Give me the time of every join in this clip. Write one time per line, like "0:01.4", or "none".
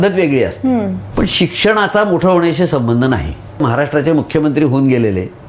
0:01.0
0:03.6